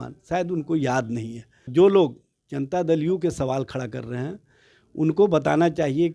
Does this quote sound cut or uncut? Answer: cut